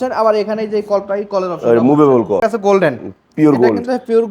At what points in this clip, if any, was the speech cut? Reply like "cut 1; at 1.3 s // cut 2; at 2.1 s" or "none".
cut 1; at 2.4 s